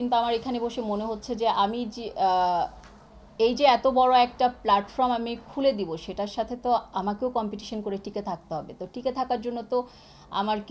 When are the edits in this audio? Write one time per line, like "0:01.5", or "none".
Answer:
none